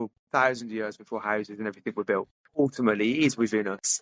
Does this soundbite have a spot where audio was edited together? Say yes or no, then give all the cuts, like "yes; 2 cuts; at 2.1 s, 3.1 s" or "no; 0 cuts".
yes; 1 cut; at 2.4 s